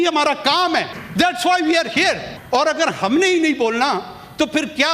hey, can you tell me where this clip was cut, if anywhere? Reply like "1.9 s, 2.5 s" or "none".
1.0 s, 2.3 s